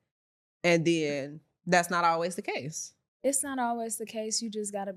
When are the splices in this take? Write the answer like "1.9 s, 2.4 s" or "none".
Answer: none